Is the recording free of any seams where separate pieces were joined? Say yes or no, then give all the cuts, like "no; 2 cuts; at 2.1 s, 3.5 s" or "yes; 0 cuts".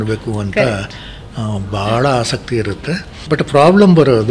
no; 1 cut; at 3.1 s